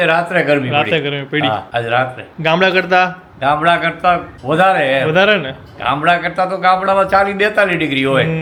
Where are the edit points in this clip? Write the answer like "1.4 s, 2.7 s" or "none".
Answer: none

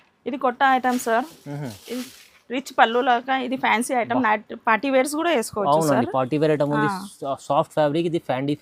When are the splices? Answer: none

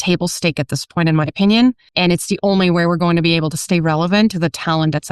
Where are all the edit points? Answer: 1.9 s

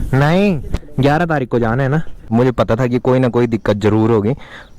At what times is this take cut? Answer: 2.1 s

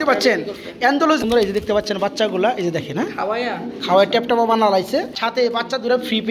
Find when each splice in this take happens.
1.2 s, 5.2 s

